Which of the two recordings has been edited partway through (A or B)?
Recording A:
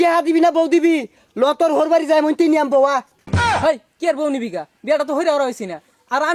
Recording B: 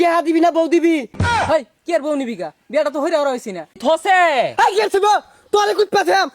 B